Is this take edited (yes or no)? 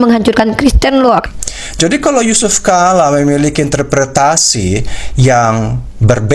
yes